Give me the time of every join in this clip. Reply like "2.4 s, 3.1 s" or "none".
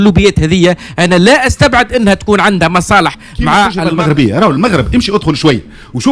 3.8 s